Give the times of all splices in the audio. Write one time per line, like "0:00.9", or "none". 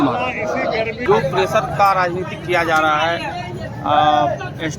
0:01.0